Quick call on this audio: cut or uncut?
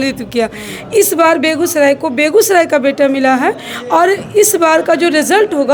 uncut